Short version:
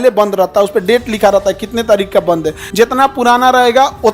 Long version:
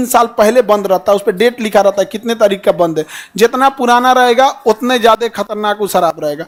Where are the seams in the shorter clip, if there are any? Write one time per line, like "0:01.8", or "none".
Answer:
0:02.6